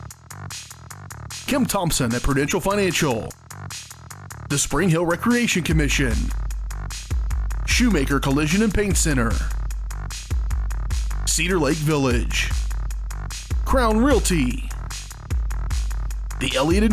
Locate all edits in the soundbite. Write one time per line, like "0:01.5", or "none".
0:01.0